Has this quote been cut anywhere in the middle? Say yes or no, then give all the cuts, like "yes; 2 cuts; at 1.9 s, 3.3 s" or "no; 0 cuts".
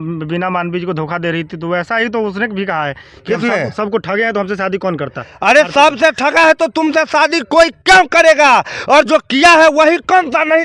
no; 0 cuts